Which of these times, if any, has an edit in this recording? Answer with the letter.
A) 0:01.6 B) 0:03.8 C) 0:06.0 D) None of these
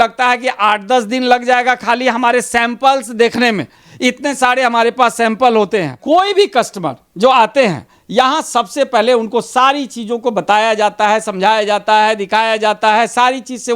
C